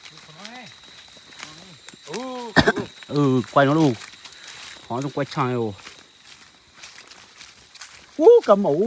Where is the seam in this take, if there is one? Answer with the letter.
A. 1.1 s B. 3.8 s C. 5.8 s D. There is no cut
D